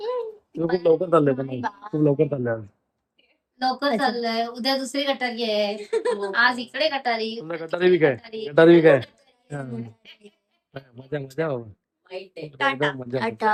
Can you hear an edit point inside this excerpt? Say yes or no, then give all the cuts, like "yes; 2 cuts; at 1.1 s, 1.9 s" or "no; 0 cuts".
no; 0 cuts